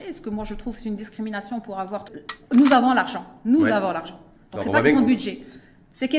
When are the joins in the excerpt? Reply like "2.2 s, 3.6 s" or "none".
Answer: 2.1 s